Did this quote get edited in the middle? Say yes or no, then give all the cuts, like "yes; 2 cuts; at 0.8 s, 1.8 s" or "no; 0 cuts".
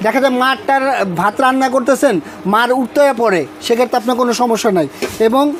no; 0 cuts